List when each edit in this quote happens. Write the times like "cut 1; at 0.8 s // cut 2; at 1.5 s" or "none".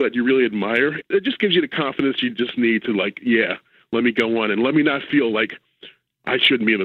cut 1; at 1.1 s